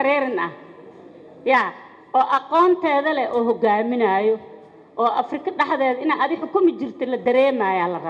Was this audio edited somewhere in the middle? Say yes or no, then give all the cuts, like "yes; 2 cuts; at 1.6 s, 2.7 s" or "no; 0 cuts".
no; 0 cuts